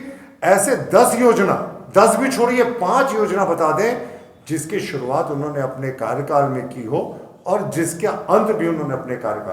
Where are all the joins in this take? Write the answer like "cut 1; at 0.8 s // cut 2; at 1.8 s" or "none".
none